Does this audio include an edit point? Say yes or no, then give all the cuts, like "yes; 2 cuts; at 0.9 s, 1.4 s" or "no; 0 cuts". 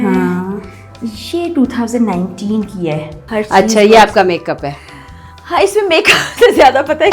yes; 1 cut; at 3.2 s